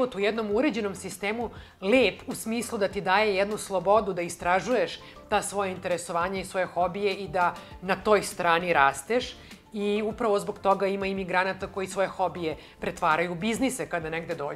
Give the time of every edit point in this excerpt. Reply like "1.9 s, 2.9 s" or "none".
none